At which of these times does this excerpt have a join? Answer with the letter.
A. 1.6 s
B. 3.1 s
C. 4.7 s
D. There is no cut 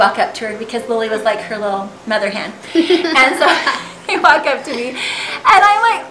D